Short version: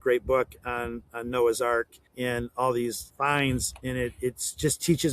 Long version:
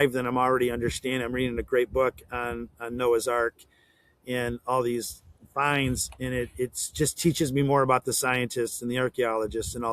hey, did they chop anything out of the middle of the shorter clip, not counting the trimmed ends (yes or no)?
yes